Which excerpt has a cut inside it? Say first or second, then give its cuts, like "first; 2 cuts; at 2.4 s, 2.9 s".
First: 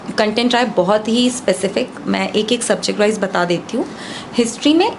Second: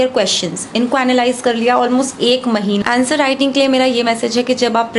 second; 1 cut; at 2.8 s